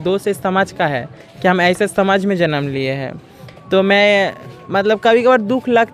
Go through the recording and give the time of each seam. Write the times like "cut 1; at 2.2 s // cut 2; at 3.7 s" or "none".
none